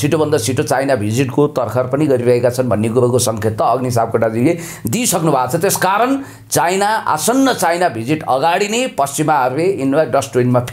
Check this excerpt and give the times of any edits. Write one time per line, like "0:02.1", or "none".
none

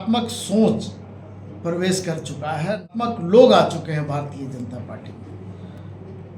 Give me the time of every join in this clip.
0:02.9

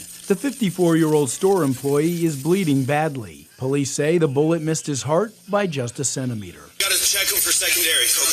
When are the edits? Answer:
none

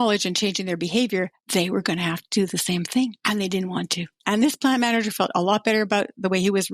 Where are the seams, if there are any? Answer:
0:01.4
0:03.2
0:04.2

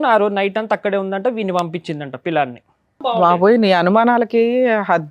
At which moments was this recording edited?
0:03.2

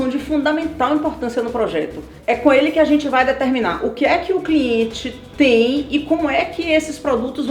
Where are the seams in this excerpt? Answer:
0:02.1

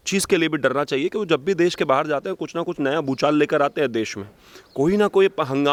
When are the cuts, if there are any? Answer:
none

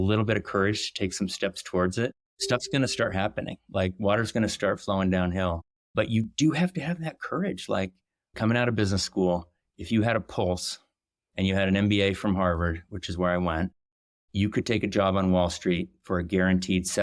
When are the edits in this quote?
none

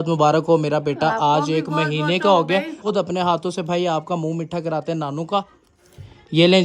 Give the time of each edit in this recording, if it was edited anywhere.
0:02.8
0:05.6

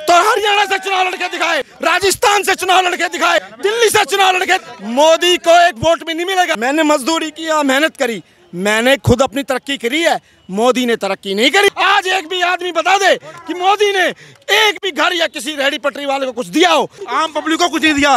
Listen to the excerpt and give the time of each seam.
0:01.7
0:03.5
0:04.6
0:06.5
0:11.7
0:17.0

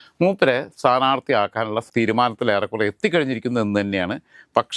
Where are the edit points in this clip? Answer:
none

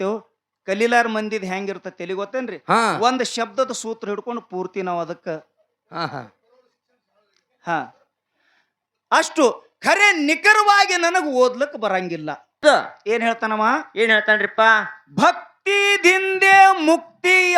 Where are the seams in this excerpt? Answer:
0:12.6

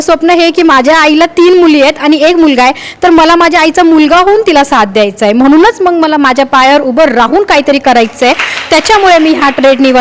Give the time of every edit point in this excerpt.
none

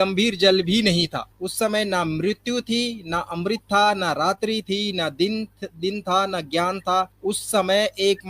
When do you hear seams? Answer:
0:01.4
0:07.1

